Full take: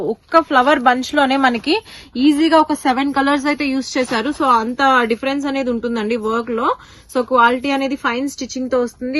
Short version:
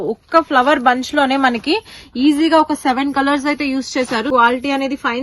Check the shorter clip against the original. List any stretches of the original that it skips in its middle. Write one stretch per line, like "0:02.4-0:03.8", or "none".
0:04.3-0:07.3